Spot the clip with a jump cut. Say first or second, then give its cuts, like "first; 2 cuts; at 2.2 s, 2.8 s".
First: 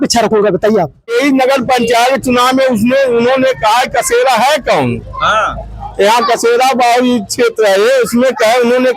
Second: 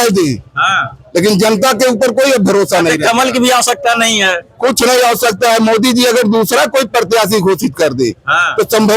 first; 1 cut; at 1.1 s